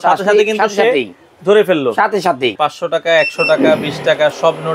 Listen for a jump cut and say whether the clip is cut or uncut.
cut